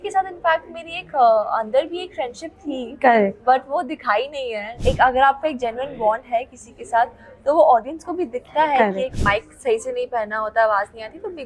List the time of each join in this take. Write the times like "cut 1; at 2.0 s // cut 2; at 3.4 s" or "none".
cut 1; at 4.7 s // cut 2; at 9.1 s